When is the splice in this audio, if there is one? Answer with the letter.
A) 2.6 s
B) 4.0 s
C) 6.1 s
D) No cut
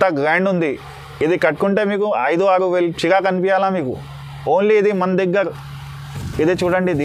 D